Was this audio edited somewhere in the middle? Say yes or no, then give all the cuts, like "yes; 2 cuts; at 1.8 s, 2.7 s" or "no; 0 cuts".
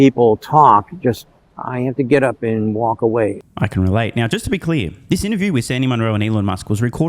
no; 0 cuts